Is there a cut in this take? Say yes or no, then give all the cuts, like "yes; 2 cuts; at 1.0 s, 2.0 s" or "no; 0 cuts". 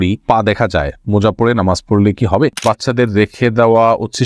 yes; 1 cut; at 2.6 s